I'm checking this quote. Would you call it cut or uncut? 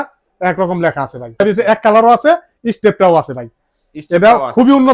cut